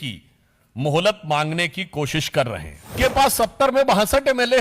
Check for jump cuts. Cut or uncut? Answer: cut